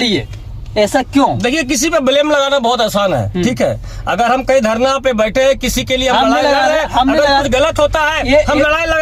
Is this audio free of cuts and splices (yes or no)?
yes